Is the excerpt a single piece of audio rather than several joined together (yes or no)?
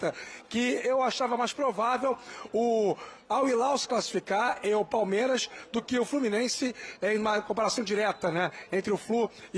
yes